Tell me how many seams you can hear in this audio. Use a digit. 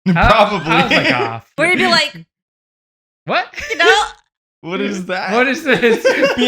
1